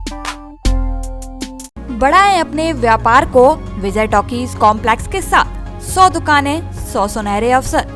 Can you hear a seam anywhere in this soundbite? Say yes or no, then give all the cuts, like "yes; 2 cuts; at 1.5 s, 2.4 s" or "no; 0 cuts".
no; 0 cuts